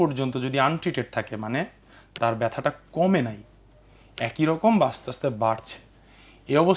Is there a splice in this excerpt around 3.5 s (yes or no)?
no